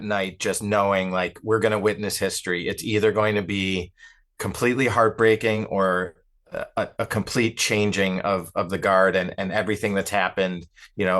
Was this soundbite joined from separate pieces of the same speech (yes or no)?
no